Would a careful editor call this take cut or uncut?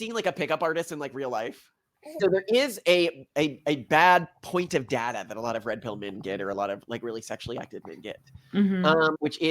cut